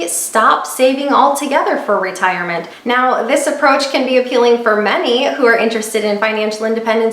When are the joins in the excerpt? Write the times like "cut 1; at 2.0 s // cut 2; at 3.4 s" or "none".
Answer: cut 1; at 2.7 s